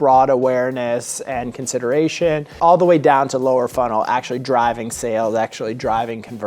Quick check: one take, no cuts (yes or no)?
no